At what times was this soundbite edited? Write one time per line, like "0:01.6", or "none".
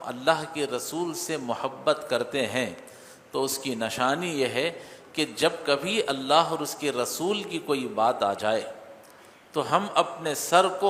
none